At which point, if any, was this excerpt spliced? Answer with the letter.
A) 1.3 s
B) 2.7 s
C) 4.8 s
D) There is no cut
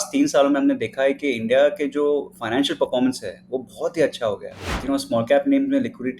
C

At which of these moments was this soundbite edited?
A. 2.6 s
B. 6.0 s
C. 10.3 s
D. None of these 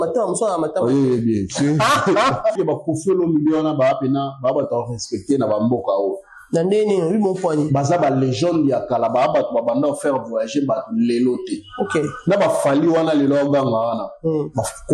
A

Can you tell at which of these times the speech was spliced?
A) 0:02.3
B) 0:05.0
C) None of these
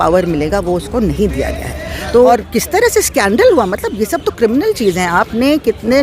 A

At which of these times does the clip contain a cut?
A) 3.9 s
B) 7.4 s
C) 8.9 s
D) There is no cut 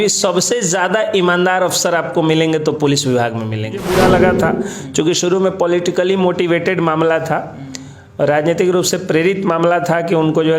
A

